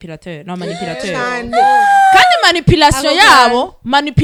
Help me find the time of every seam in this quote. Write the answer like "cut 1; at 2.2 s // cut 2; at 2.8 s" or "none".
none